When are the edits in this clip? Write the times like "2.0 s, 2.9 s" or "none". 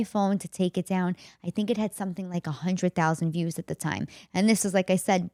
none